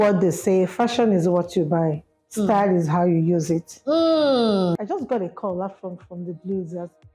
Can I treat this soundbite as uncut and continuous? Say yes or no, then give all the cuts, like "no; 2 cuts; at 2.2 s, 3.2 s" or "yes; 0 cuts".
no; 1 cut; at 4.8 s